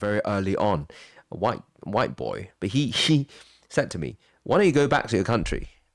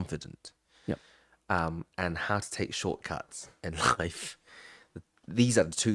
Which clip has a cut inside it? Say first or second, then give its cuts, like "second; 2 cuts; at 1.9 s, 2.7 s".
first; 1 cut; at 2.5 s